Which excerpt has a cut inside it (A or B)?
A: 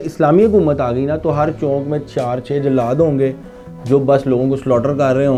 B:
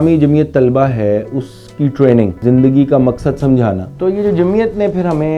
B